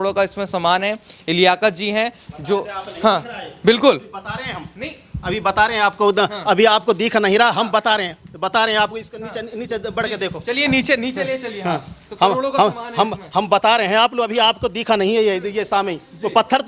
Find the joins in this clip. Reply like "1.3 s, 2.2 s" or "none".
none